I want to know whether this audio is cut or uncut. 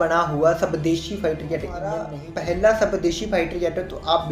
cut